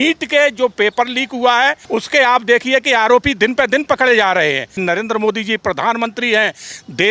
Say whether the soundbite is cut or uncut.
cut